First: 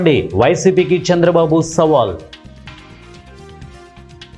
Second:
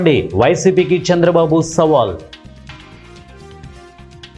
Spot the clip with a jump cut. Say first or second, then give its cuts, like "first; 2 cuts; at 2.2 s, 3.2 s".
first; 1 cut; at 2.7 s